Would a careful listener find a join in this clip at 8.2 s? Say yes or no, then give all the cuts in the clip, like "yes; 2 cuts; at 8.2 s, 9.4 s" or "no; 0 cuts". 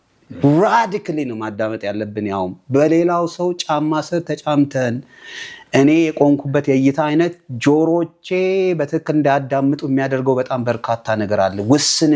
no; 0 cuts